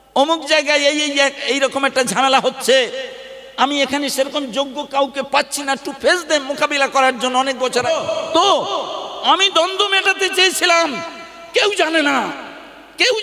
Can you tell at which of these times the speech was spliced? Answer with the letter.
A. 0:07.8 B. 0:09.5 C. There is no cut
A